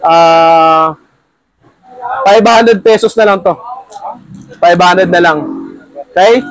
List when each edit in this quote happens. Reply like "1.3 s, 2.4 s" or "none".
none